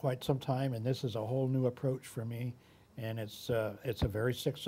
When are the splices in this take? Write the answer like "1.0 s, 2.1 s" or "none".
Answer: none